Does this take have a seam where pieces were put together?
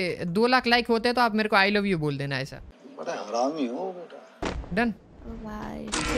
no; 0 cuts

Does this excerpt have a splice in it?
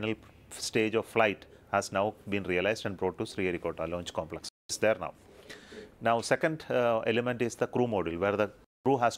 no; 0 cuts

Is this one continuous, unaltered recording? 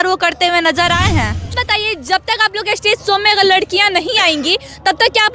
no; 1 cut; at 1.5 s

